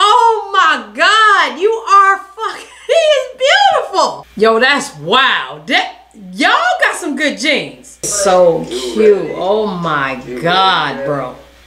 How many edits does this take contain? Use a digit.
1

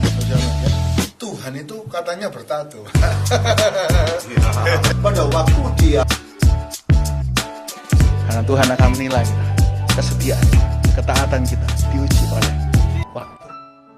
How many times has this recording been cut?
0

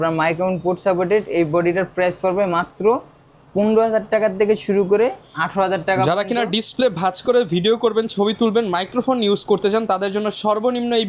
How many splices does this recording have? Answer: 0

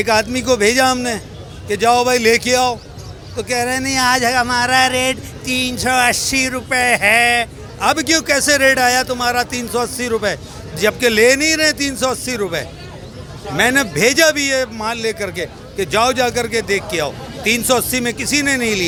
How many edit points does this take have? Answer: 0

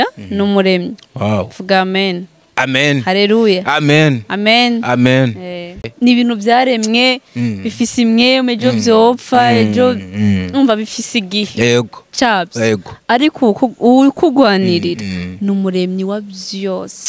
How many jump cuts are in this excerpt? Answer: 1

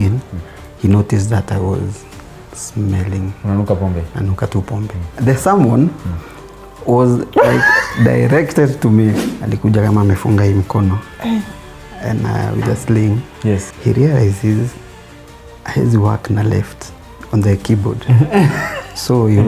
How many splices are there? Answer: 3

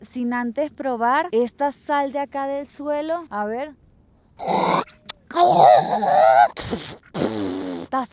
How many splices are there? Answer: 1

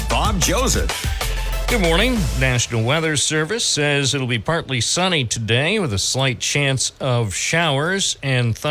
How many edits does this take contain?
1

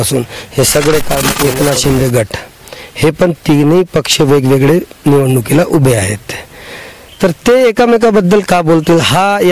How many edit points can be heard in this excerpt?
1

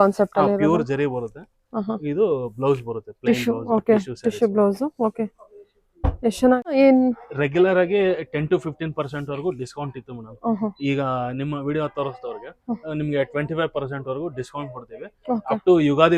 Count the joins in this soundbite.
1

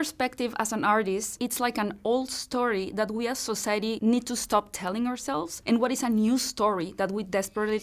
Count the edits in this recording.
2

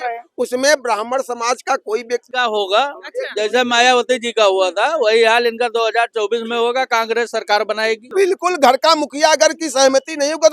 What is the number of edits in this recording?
2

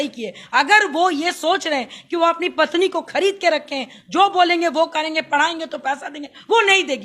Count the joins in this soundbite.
0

